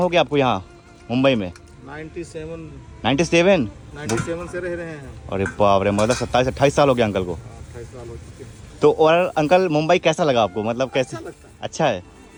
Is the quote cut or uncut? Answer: uncut